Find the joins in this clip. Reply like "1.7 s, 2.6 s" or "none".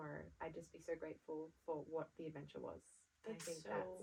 none